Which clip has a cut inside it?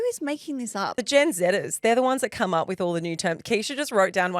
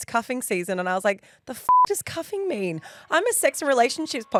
first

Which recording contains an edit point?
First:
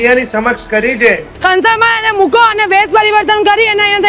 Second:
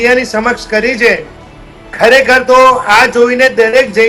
first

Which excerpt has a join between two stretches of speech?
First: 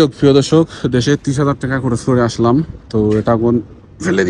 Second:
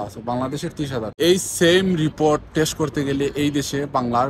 second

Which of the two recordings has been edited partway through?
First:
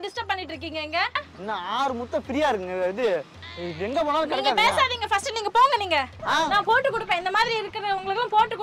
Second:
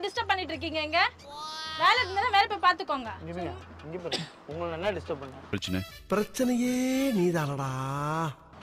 first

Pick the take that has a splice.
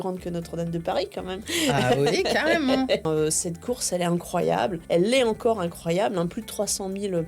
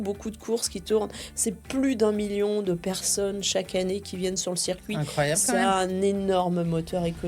first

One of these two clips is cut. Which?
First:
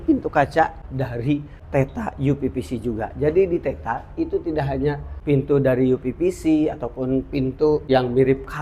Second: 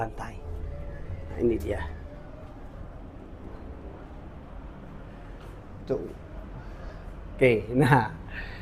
first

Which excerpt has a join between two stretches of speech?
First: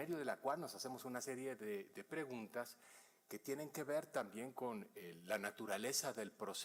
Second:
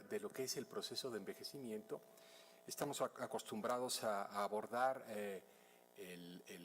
second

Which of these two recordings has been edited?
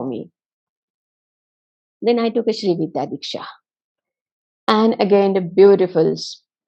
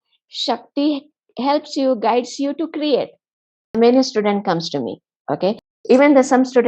second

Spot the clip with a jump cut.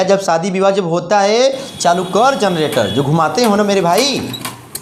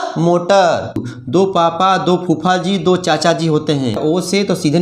second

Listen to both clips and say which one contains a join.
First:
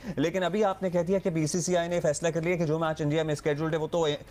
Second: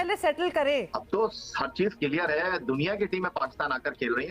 second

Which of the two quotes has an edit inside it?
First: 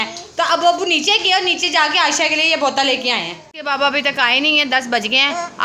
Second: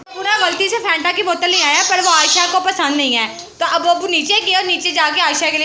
first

